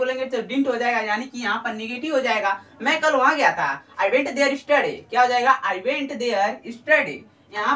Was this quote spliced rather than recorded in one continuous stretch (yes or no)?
no